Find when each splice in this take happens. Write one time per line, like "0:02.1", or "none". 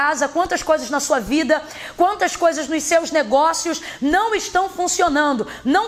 none